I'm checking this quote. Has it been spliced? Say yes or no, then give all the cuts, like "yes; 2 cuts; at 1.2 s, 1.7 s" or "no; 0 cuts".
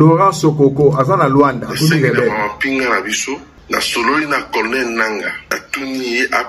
yes; 2 cuts; at 3.5 s, 5.5 s